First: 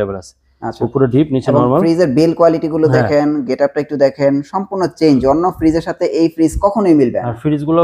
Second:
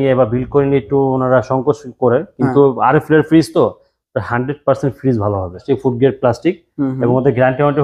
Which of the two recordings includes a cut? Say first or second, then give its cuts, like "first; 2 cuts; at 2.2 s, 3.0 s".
second; 1 cut; at 5.6 s